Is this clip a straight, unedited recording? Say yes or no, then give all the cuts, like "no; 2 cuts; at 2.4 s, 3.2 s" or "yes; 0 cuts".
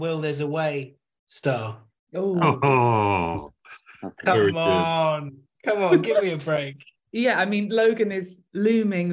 yes; 0 cuts